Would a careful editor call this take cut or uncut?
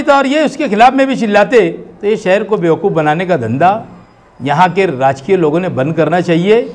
uncut